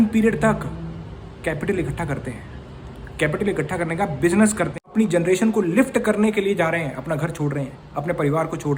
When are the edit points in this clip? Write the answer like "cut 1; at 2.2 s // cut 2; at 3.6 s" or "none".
cut 1; at 4.9 s

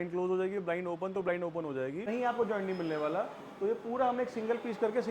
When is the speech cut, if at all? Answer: cut 1; at 2.0 s

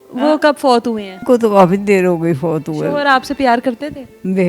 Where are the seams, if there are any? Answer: cut 1; at 1.2 s

